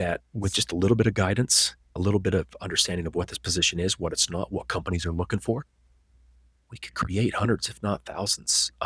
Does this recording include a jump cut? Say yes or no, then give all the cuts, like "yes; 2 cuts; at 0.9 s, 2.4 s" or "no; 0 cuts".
yes; 1 cut; at 2.0 s